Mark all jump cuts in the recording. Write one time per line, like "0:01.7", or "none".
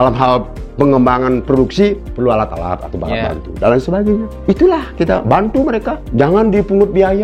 0:04.3
0:06.0